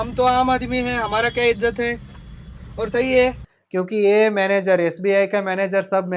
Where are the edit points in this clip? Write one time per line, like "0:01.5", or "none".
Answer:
0:03.5